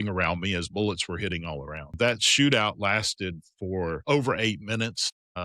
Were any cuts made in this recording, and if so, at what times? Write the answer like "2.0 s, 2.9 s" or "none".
1.9 s